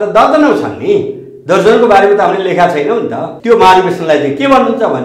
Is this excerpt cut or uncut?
cut